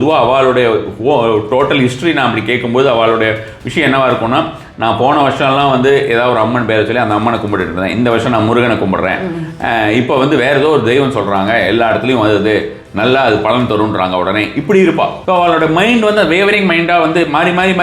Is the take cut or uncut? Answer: cut